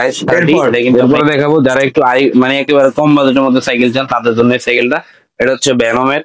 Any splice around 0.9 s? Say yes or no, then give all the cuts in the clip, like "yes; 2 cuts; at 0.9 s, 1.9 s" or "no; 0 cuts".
yes; 1 cut; at 0.9 s